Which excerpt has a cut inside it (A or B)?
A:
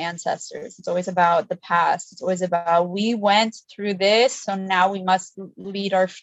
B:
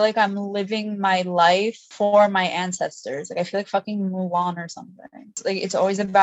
B